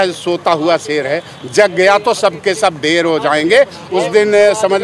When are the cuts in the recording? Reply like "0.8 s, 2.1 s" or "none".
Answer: 3.8 s